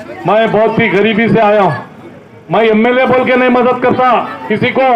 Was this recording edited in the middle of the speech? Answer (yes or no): no